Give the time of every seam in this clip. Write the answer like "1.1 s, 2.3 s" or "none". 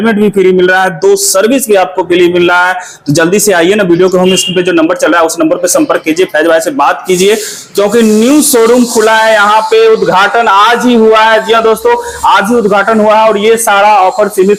none

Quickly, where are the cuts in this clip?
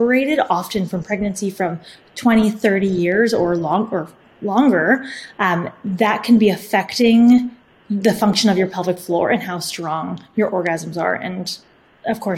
none

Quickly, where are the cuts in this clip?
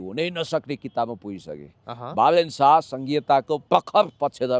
3.6 s

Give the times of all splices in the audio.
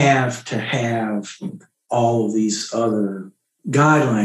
none

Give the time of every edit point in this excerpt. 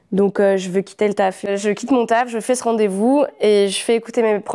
1.5 s

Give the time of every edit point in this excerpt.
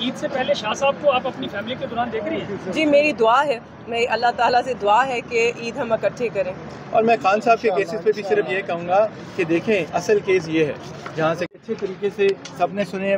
11.5 s

